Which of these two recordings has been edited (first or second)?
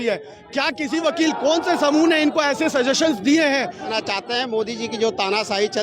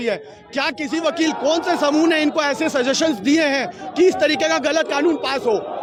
first